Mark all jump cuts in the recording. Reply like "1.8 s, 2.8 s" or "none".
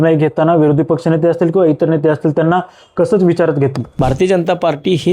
3.8 s